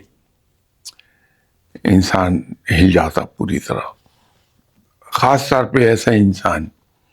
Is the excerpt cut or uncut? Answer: uncut